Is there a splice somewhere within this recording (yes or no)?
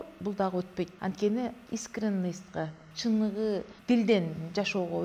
yes